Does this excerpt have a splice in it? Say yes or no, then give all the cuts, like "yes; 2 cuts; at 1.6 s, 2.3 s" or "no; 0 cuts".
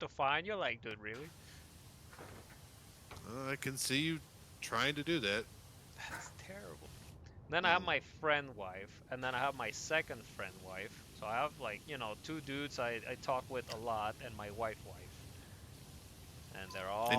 yes; 1 cut; at 6.9 s